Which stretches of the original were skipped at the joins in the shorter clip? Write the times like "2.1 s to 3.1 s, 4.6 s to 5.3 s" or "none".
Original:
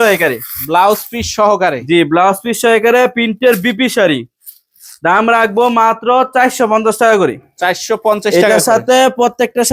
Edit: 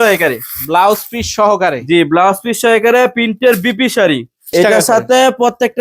4.5 s to 8.2 s

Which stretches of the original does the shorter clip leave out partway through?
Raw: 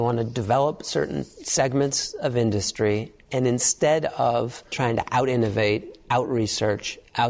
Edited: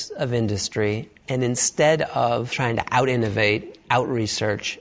4.6 s to 4.7 s

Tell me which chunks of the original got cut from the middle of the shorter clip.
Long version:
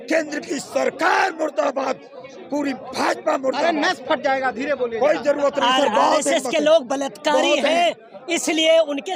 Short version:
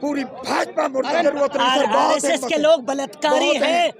3.7 s to 5.3 s

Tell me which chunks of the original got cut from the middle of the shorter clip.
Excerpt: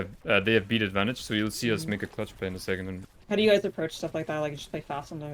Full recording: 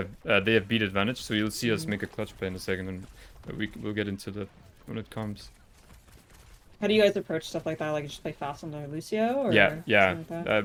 3.1 s to 6.6 s

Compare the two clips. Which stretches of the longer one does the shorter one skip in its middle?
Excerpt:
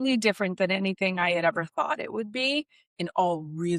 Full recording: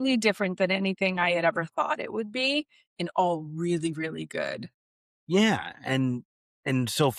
none

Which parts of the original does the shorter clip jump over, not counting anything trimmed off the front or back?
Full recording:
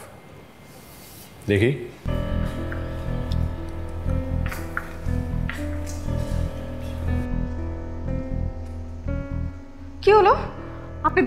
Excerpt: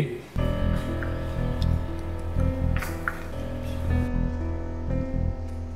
5.0 s to 6.5 s

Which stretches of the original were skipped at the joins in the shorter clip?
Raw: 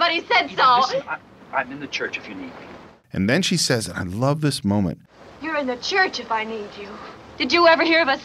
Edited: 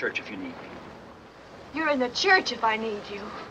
3.2 s to 4.9 s

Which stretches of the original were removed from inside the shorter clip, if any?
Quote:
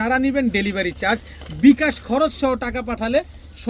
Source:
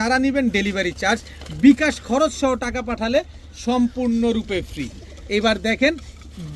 none

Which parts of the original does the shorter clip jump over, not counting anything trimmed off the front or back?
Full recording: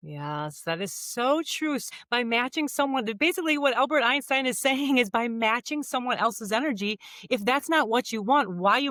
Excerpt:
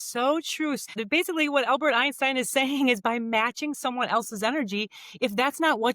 2.0 s to 3.1 s

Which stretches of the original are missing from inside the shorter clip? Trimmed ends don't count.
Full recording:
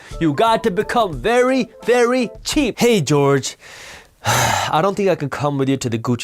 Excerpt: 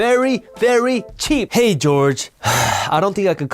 3.6 s to 4.1 s

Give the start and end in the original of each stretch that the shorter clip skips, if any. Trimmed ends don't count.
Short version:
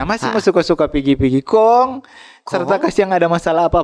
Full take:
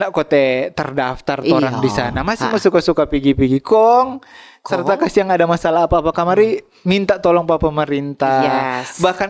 none

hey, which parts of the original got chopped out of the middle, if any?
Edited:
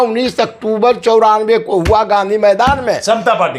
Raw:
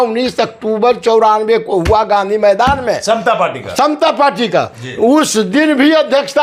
none

